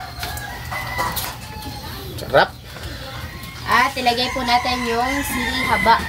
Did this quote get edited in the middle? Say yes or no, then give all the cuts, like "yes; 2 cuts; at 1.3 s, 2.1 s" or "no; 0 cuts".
no; 0 cuts